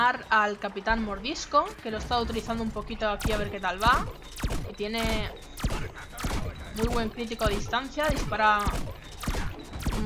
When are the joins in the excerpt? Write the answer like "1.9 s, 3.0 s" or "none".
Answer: 3.2 s